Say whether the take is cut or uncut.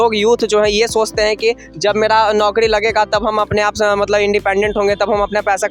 uncut